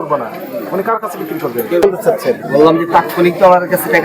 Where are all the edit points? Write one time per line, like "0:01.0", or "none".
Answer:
0:01.8